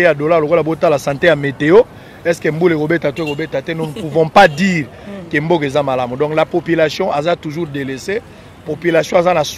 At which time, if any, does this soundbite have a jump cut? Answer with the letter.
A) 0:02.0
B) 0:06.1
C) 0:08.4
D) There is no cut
D